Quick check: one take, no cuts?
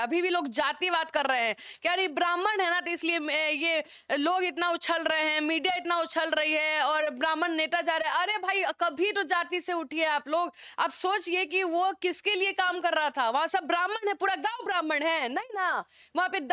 yes; 0 cuts

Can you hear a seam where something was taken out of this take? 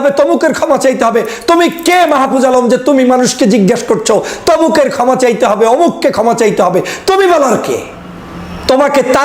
no; 0 cuts

